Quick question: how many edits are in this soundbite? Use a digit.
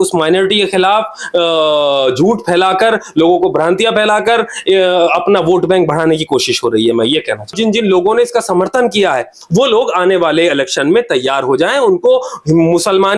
1